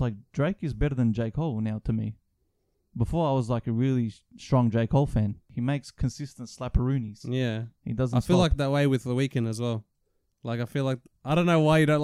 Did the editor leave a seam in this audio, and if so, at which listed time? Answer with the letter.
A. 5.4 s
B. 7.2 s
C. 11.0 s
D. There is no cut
A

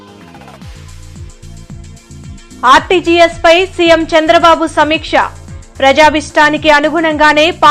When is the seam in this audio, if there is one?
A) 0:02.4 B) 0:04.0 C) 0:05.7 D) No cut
A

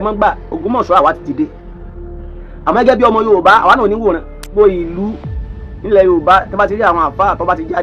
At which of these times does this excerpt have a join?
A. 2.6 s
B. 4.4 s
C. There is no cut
B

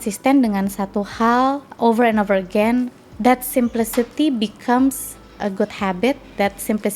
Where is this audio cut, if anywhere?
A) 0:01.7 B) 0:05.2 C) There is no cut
A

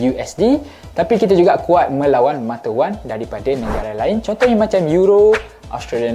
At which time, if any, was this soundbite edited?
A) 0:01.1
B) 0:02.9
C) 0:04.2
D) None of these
D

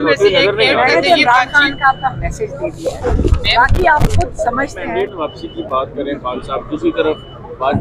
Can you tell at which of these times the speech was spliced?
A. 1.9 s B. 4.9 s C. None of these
B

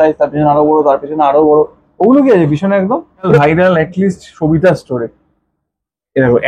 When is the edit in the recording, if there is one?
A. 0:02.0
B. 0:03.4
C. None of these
B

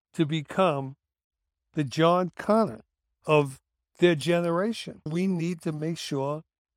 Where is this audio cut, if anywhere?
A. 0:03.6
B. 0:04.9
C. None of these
B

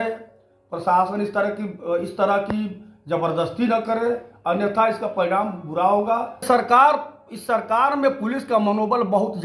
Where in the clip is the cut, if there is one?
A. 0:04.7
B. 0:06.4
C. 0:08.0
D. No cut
B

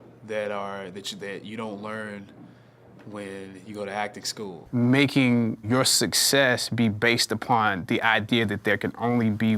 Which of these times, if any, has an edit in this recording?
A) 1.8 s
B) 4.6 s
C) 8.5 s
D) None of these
B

